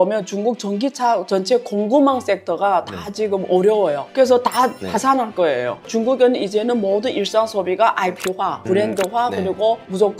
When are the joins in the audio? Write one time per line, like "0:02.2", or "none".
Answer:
0:05.9